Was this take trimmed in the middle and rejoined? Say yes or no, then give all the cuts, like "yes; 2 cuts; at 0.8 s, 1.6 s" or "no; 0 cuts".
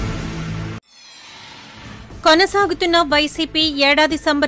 yes; 1 cut; at 1.8 s